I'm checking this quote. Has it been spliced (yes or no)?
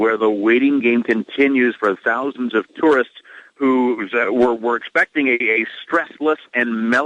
no